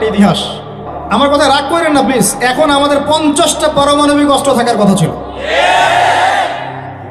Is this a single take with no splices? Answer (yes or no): no